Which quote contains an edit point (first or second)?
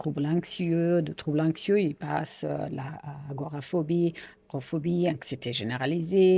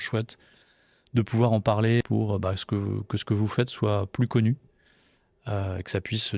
second